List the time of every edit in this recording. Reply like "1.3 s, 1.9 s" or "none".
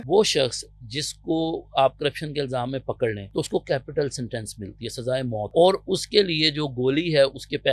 3.2 s, 5.5 s

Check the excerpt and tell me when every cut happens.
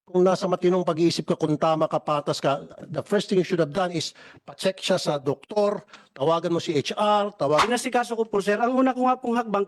7.6 s

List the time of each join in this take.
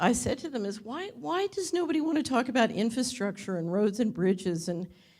0.9 s

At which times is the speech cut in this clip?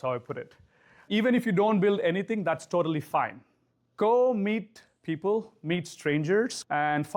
1.0 s

